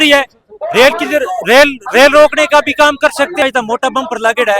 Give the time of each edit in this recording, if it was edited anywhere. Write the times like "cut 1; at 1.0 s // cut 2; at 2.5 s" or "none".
cut 1; at 3.4 s

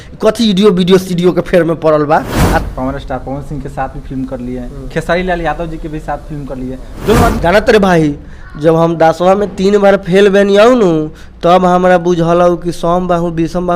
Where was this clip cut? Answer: cut 1; at 2.6 s // cut 2; at 7.4 s

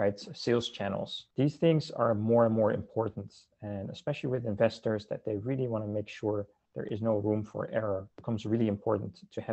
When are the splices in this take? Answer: cut 1; at 1.2 s // cut 2; at 8.1 s

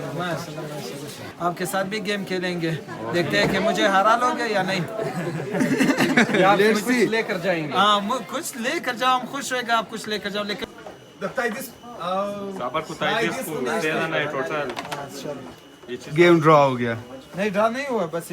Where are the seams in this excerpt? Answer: cut 1; at 1.3 s // cut 2; at 10.6 s

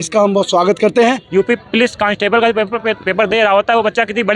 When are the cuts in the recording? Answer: cut 1; at 1.2 s

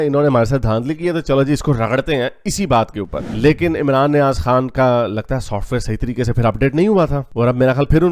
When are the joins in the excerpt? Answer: cut 1; at 3.2 s

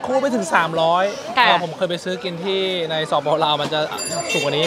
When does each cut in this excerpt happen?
none

